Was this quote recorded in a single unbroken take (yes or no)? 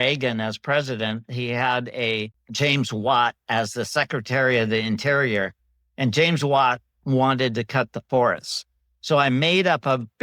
no